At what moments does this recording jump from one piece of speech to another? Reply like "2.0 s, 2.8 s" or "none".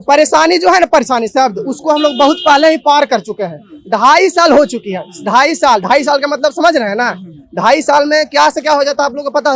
none